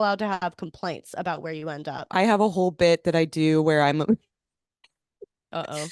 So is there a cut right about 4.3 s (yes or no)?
no